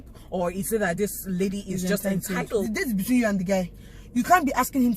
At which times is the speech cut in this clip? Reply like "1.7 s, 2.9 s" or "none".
2.6 s